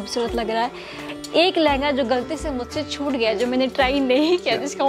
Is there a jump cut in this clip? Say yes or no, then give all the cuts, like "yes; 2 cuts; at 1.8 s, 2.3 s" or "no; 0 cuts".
yes; 1 cut; at 0.9 s